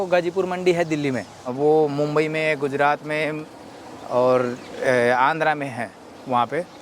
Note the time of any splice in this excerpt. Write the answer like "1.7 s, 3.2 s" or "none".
1.5 s